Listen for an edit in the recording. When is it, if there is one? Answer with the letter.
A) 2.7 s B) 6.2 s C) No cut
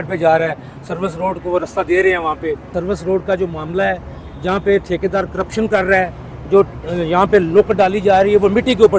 A